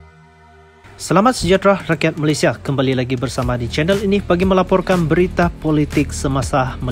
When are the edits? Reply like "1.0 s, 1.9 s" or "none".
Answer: 1.0 s